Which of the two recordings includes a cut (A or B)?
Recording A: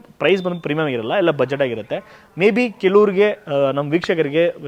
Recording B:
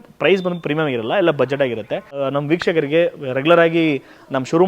B